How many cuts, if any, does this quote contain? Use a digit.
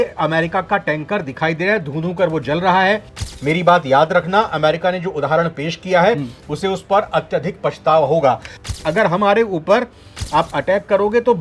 2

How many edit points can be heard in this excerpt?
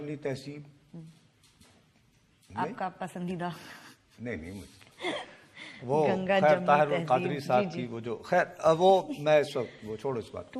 0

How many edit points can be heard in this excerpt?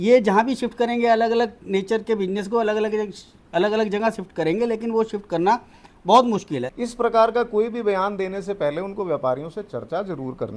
1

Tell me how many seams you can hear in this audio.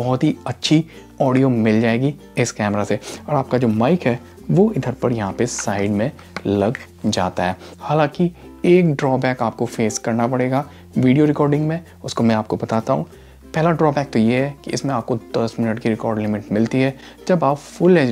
0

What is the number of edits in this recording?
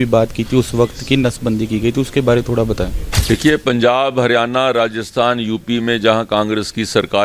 1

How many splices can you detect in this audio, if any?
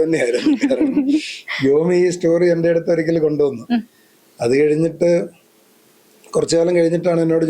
0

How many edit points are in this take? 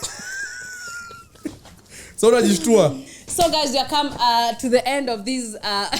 0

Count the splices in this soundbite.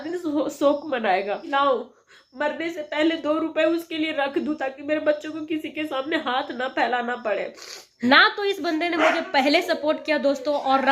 2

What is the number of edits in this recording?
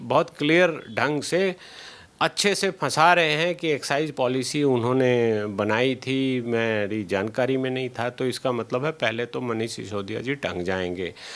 0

